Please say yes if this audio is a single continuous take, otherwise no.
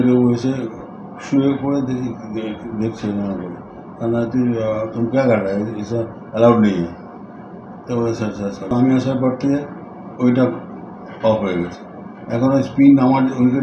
no